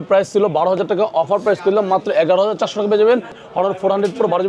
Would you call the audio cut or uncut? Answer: cut